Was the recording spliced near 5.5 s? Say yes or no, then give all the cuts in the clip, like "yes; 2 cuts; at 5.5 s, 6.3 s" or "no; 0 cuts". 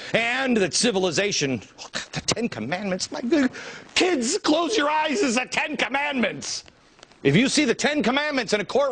no; 1 cut; at 2.8 s